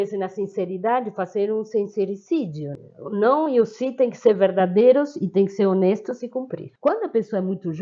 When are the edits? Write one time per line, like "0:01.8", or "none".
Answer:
0:02.7
0:06.6